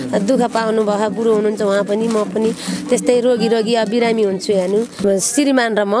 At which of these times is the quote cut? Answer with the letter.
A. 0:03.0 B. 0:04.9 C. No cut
B